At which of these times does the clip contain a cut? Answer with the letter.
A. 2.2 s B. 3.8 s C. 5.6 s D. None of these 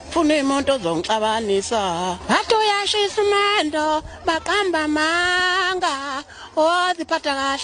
A